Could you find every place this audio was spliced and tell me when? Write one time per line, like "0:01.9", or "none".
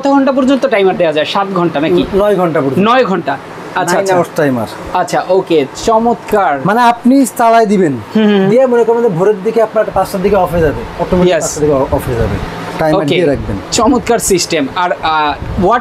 none